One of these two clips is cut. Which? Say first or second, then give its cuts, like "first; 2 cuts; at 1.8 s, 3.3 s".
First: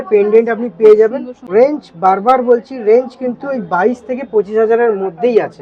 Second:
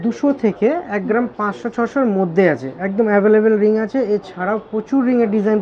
first; 1 cut; at 1.3 s